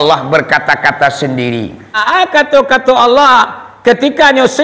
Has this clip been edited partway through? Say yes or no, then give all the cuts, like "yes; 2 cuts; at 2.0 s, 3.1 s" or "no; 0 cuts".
yes; 1 cut; at 2.0 s